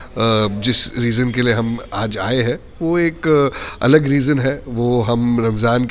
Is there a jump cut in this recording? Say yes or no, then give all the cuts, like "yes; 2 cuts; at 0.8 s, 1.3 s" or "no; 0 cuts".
no; 0 cuts